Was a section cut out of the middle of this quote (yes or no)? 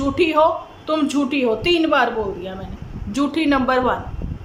no